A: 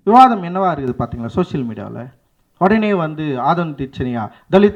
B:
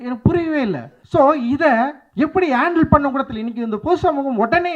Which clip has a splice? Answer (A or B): B